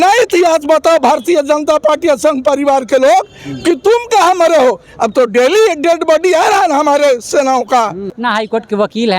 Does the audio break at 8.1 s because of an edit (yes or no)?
yes